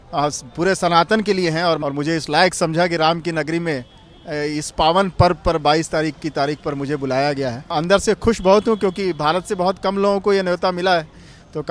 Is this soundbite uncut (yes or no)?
no